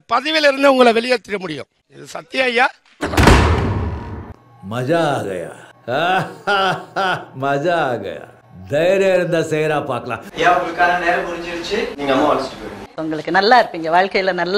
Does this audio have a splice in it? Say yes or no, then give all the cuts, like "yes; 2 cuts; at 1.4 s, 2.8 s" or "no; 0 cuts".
no; 0 cuts